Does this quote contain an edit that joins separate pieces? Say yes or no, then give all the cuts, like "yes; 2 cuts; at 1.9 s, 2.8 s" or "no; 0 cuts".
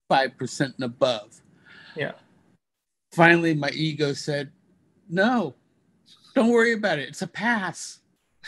no; 0 cuts